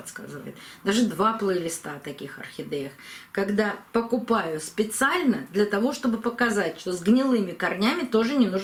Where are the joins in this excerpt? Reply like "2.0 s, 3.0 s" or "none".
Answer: none